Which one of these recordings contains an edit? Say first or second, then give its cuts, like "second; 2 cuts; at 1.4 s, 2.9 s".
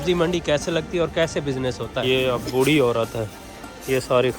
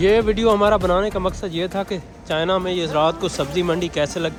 first; 1 cut; at 2.0 s